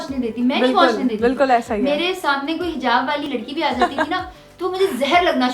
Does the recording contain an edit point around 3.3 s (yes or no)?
yes